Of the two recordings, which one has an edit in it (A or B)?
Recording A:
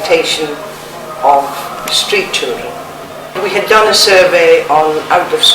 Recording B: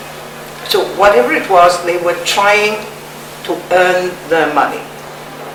A